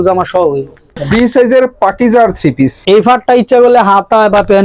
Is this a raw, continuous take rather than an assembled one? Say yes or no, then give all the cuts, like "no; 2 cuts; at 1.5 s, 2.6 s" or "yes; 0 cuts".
no; 2 cuts; at 1.0 s, 2.8 s